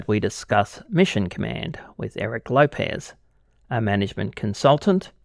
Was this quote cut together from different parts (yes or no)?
no